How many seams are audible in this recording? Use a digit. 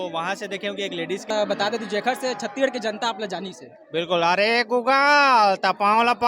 1